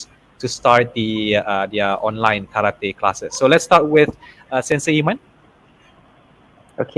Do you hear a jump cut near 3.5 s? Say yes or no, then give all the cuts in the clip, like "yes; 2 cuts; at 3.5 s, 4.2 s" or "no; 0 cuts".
no; 0 cuts